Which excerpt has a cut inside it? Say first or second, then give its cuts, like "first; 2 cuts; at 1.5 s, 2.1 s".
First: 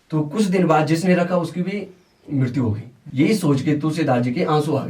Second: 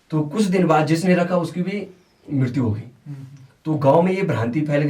first; 1 cut; at 2.9 s